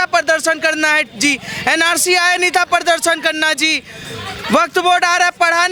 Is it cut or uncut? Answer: uncut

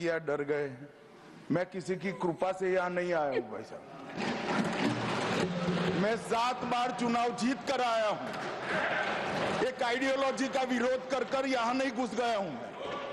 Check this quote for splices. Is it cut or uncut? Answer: uncut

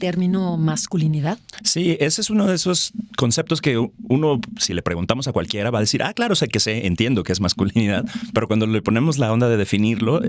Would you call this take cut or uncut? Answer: uncut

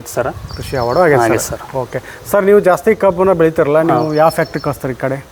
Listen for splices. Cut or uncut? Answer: uncut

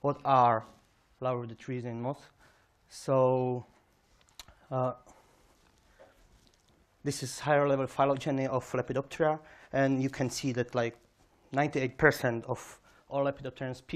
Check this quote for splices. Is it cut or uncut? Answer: cut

